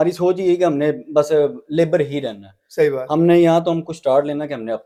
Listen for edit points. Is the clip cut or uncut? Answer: uncut